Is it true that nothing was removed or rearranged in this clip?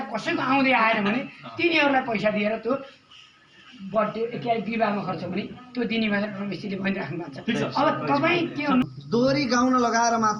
no; 1 cut; at 8.8 s

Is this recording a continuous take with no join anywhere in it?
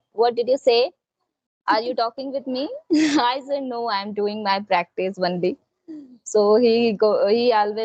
yes; 0 cuts

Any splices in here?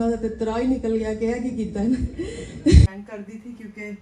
yes; 1 cut; at 2.9 s

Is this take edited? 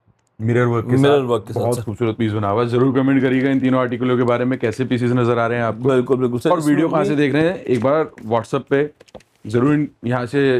no; 0 cuts

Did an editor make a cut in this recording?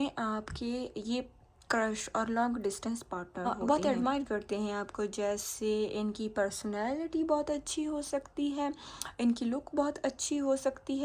yes; 1 cut; at 3.5 s

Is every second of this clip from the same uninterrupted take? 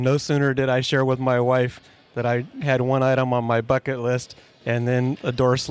yes; 0 cuts

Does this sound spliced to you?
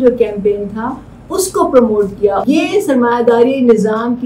yes; 1 cut; at 2.4 s

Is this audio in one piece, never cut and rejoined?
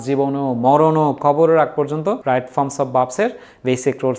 no; 1 cut; at 2.2 s

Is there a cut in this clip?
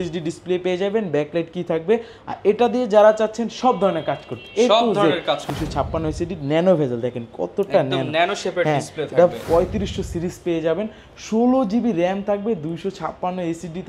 yes; 2 cuts; at 5.4 s, 9.4 s

